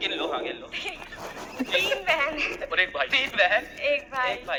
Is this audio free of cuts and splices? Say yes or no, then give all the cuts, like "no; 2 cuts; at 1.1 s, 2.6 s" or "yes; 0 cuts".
yes; 0 cuts